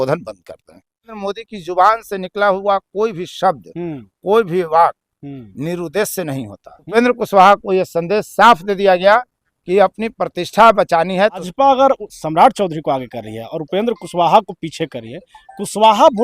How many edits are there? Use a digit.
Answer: 3